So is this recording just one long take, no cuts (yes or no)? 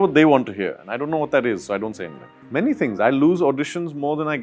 no